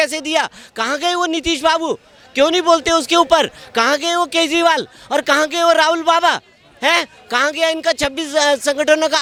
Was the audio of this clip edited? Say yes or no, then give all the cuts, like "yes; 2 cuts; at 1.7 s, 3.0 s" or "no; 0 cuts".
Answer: no; 0 cuts